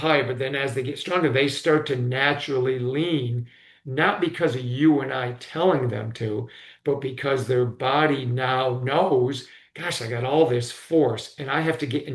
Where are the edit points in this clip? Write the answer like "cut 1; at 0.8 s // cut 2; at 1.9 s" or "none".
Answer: none